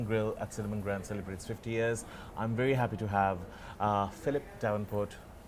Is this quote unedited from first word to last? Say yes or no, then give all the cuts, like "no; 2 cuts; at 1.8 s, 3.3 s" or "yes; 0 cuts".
yes; 0 cuts